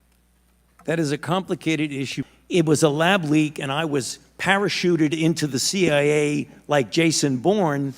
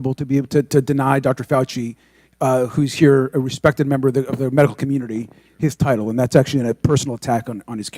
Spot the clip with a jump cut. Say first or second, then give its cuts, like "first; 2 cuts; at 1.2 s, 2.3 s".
first; 1 cut; at 2.2 s